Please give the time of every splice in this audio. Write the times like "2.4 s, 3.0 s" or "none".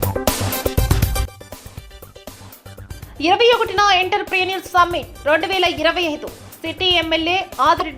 1.2 s, 2.8 s